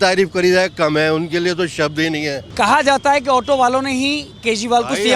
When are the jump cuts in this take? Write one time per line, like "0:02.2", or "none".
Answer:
0:02.4